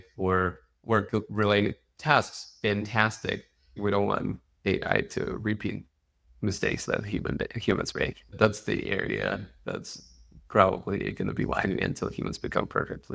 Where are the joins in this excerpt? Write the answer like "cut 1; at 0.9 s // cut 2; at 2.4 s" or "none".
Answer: cut 1; at 3.8 s // cut 2; at 8.3 s